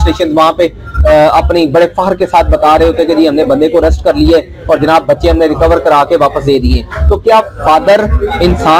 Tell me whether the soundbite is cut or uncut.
uncut